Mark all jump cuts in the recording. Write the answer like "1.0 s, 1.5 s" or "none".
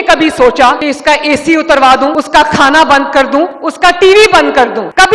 none